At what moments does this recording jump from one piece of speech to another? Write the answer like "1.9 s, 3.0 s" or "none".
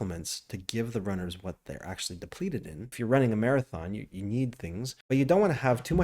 3.0 s, 4.9 s